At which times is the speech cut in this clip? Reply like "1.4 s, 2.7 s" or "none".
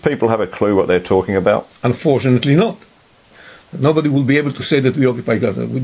1.7 s, 3.2 s